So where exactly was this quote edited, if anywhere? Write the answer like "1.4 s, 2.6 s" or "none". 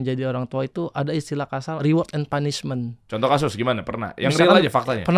1.8 s, 3.0 s